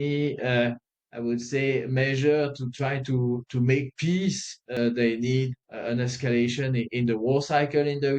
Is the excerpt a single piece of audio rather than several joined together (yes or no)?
no